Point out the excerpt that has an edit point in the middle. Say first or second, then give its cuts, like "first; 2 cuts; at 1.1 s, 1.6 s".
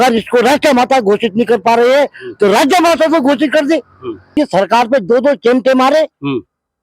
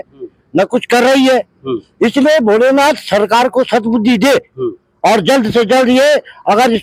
first; 1 cut; at 4.3 s